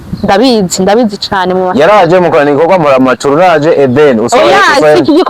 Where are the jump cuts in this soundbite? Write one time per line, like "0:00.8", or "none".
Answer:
none